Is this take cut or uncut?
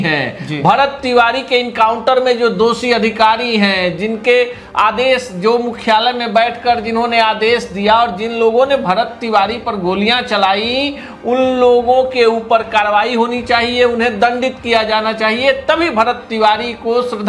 uncut